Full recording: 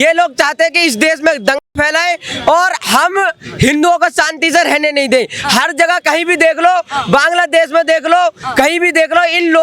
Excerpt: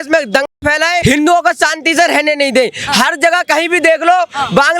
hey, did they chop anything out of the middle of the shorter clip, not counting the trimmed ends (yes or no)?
yes